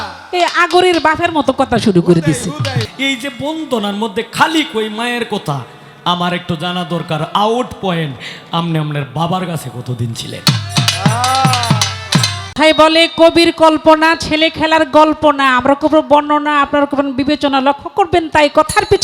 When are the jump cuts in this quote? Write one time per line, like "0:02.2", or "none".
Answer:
0:02.8
0:12.5